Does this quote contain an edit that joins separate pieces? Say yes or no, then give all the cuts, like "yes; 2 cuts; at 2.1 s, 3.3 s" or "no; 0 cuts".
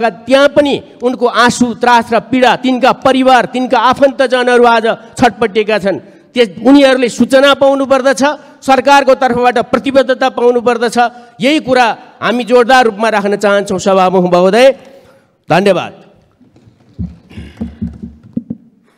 no; 0 cuts